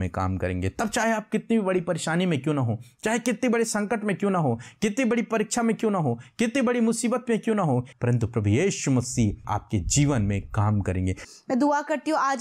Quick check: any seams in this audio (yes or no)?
yes